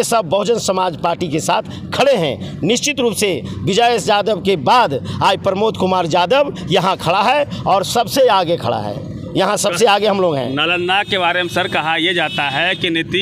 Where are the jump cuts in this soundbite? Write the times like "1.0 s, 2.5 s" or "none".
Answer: none